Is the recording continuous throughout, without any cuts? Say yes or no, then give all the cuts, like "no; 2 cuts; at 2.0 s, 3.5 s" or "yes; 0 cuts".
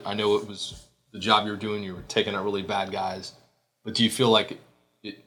yes; 0 cuts